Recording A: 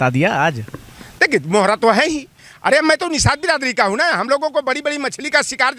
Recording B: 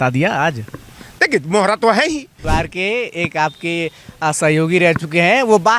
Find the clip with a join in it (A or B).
B